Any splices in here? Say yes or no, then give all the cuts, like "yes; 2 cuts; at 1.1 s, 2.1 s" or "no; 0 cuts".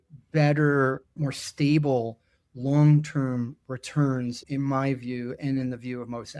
yes; 2 cuts; at 1.1 s, 4.4 s